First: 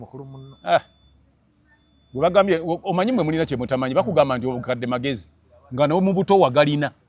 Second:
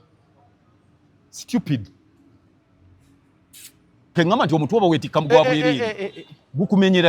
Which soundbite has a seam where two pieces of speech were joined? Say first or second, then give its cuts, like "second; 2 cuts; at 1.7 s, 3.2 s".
second; 1 cut; at 4.1 s